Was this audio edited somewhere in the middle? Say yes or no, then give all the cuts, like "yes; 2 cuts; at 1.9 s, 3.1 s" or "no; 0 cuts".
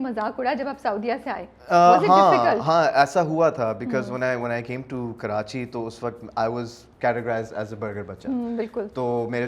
no; 0 cuts